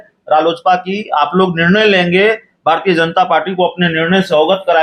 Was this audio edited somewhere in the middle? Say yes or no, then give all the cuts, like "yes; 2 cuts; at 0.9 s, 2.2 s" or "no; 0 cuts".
no; 0 cuts